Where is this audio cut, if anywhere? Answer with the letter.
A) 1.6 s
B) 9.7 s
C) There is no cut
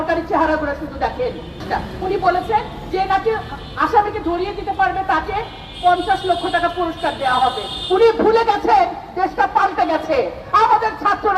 A